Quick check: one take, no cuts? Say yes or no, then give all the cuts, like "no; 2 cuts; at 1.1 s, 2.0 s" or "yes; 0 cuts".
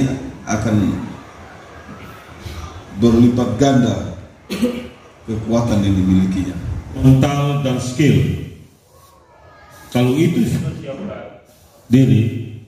no; 1 cut; at 7.0 s